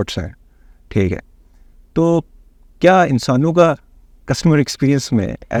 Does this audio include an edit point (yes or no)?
no